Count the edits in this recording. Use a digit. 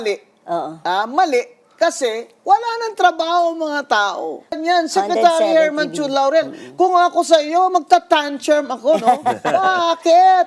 1